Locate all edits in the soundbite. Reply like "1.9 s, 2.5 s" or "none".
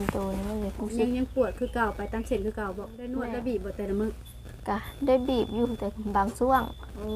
3.0 s

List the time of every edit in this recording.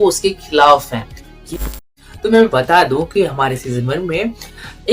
1.8 s

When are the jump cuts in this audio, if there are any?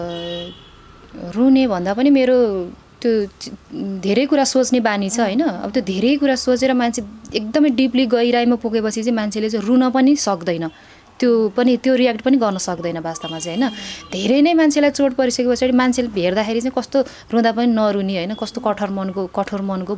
none

